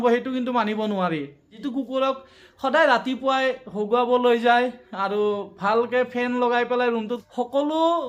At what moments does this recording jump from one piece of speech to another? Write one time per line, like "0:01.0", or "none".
0:01.5
0:07.2

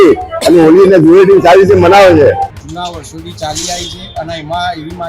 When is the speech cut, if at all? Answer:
0:02.5

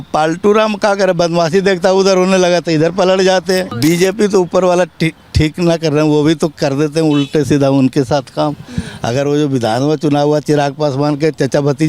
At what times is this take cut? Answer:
0:03.7

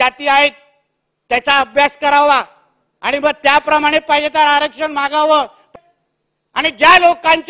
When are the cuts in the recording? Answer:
0:05.7

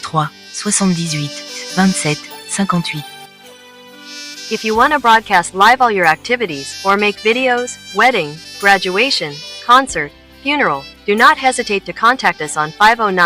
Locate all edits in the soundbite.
0:01.0

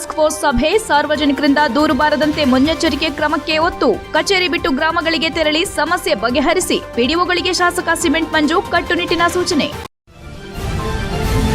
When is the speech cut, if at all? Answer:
0:09.9

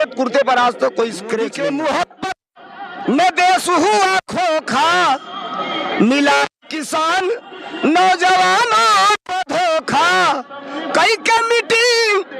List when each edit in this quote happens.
0:01.5

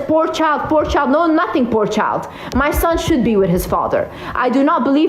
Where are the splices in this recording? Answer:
none

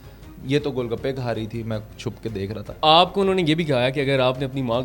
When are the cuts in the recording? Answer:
0:02.7

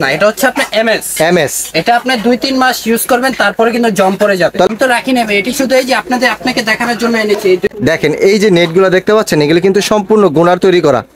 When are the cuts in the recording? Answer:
0:04.7
0:07.6

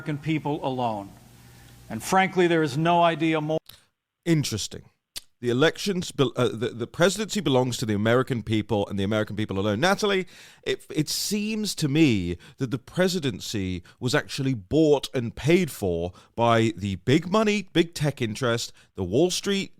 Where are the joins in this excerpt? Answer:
none

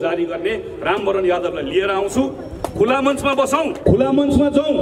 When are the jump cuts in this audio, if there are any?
0:03.8

